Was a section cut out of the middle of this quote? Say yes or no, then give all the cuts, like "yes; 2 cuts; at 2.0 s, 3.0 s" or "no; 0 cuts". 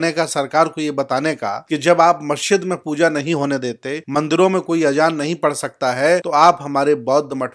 yes; 3 cuts; at 1.5 s, 3.9 s, 6.2 s